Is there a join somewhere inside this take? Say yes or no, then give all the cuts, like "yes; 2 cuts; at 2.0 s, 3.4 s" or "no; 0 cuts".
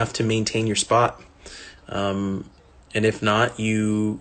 no; 0 cuts